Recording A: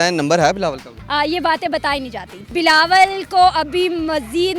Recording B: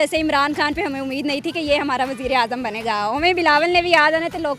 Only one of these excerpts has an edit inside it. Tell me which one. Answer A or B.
A